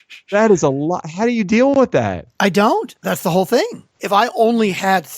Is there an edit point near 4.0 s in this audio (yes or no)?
yes